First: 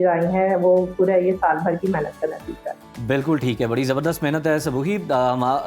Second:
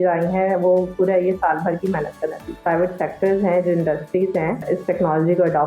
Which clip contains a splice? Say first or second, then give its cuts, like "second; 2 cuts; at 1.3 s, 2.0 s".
second; 2 cuts; at 2.6 s, 4.6 s